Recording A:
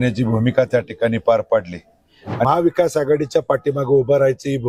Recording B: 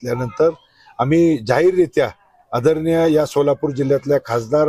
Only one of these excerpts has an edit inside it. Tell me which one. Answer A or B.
A